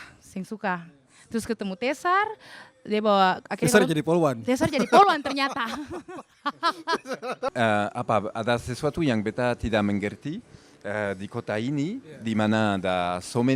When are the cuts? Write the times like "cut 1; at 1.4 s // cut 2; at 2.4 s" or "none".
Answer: cut 1; at 7.5 s